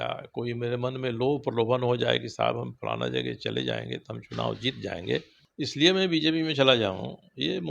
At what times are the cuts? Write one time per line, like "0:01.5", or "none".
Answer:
0:05.4